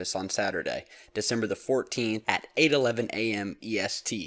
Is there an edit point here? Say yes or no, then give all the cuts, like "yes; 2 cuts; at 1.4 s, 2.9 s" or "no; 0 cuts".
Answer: no; 0 cuts